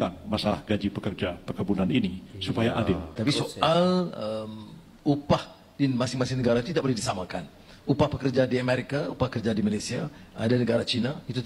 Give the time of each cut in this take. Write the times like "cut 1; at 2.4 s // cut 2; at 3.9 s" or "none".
cut 1; at 3.2 s